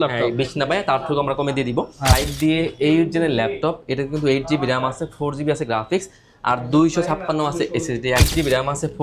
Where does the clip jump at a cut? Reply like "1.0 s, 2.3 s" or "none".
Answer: 2.2 s, 8.3 s